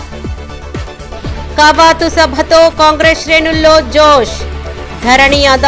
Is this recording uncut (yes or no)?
yes